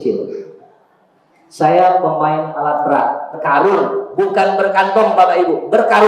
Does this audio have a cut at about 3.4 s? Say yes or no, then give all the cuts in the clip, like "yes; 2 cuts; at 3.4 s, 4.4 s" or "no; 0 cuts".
yes; 1 cut; at 3.4 s